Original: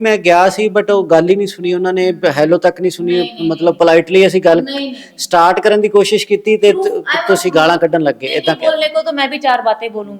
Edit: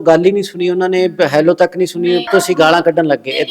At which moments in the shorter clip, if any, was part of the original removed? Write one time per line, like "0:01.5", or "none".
0:02.2

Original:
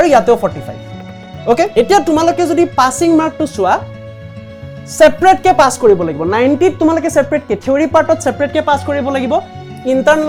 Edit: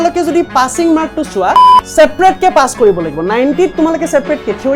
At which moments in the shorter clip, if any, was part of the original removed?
0:01.8

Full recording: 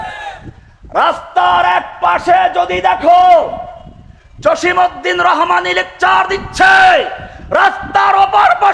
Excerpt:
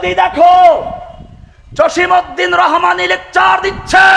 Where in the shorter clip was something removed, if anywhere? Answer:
none

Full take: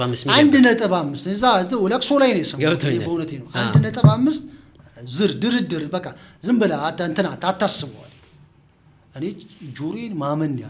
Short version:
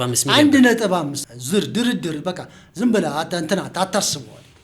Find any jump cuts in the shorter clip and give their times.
0:01.2

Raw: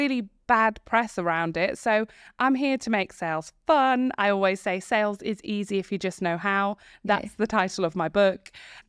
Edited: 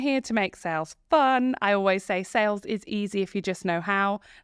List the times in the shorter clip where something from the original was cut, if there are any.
none

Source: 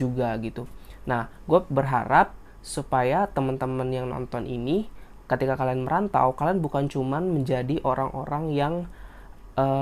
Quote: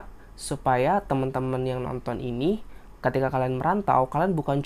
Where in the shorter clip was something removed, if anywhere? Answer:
none

